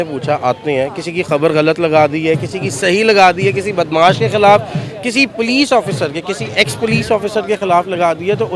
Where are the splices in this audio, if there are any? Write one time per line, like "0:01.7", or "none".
none